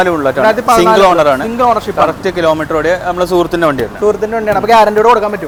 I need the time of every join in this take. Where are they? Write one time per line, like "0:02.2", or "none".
none